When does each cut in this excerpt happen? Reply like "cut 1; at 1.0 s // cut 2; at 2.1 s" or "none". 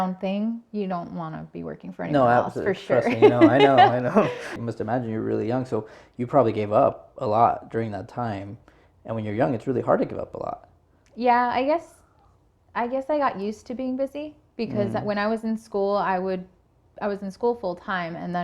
cut 1; at 4.6 s